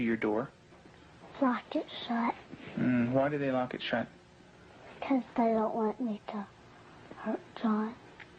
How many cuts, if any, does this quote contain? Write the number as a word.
one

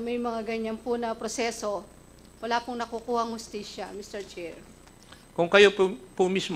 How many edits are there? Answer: one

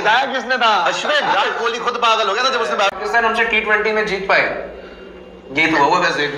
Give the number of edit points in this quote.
two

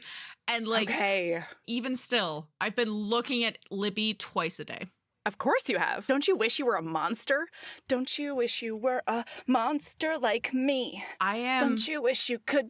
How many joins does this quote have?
one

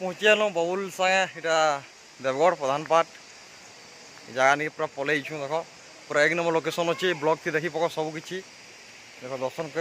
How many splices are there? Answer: zero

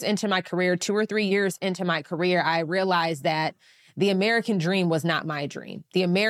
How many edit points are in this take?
one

